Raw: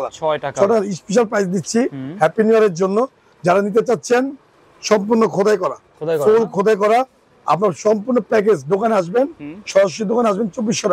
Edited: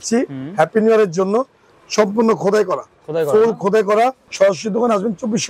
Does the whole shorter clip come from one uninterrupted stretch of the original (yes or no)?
no